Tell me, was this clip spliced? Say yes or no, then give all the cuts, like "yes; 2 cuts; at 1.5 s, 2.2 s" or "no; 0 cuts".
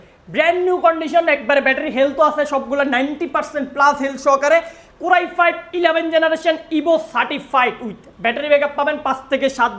no; 0 cuts